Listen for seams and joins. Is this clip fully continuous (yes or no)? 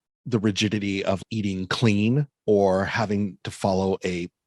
no